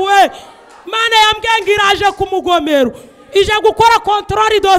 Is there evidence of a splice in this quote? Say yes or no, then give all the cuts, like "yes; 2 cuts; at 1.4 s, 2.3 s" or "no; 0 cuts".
no; 0 cuts